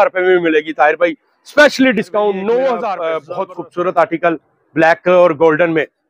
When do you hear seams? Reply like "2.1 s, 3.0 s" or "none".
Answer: 3.1 s